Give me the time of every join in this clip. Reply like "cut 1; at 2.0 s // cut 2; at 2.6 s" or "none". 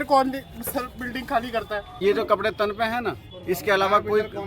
cut 1; at 2.0 s

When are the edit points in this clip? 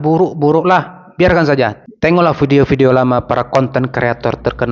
cut 1; at 1.8 s

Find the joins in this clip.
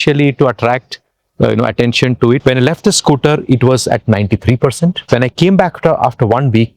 cut 1; at 2.4 s // cut 2; at 5.0 s

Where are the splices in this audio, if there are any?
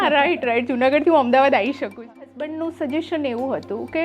cut 1; at 2.0 s

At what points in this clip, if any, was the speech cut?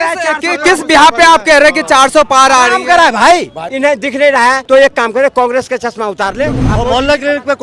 cut 1; at 3.7 s // cut 2; at 4.6 s // cut 3; at 6.6 s

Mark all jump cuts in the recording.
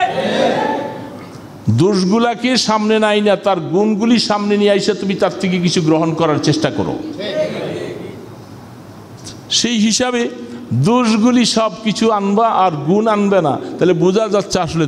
none

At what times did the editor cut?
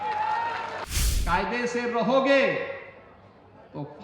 cut 1; at 0.9 s

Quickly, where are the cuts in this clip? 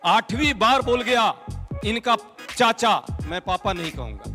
none

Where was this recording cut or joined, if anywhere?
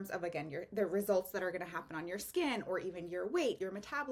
none

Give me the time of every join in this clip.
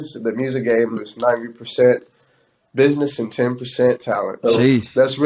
cut 1; at 1.0 s

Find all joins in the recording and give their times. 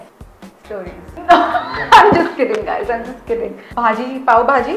cut 1; at 1.1 s // cut 2; at 3.6 s

